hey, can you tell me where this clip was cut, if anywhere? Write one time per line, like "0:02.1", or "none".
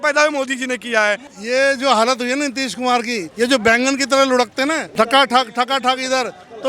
0:01.3
0:03.3
0:04.8

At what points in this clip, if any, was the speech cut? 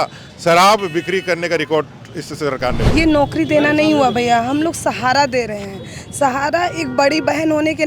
0:02.9

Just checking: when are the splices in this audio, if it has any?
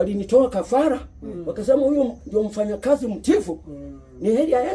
none

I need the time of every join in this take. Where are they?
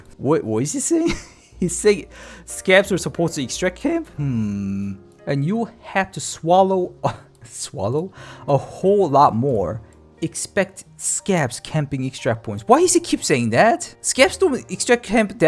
0:05.1

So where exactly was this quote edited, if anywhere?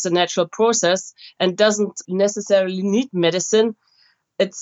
0:02.0

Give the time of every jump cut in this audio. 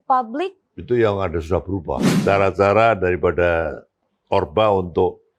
0:02.1

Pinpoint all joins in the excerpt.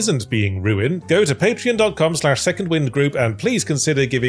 0:01.0

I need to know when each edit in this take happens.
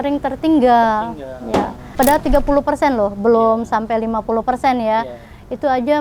0:01.9

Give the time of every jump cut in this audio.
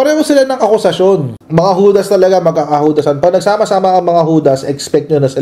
0:01.4

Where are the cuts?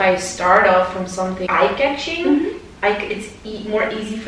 0:01.4

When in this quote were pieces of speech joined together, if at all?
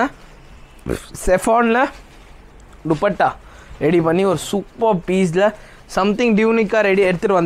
none

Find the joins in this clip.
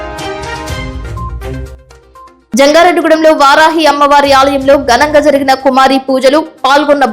0:01.5

